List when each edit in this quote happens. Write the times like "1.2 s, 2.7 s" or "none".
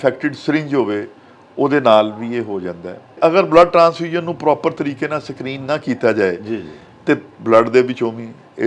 3.2 s